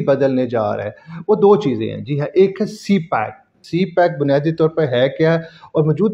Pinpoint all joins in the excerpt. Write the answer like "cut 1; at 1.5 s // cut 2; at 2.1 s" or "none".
cut 1; at 3.6 s